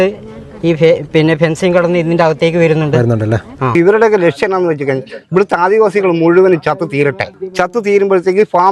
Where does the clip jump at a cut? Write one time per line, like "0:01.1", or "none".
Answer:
0:03.7
0:07.4